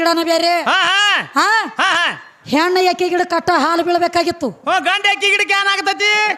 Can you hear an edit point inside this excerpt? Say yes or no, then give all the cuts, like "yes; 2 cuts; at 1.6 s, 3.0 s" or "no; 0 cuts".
no; 0 cuts